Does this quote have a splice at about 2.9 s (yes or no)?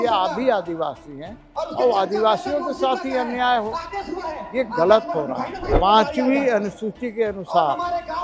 no